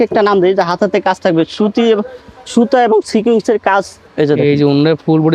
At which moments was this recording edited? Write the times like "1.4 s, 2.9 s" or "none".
4.0 s